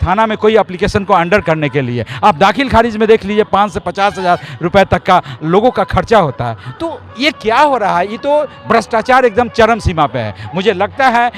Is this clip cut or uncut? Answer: uncut